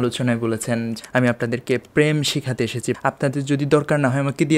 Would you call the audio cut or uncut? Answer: cut